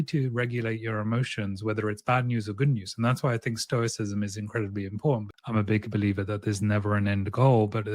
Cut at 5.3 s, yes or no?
yes